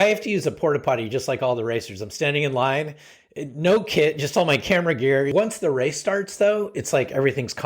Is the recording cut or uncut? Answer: cut